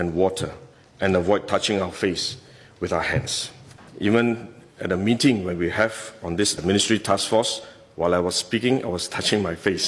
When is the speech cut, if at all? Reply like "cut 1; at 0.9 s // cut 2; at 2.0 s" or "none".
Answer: cut 1; at 3.8 s